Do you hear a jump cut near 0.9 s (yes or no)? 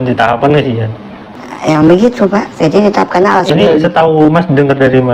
no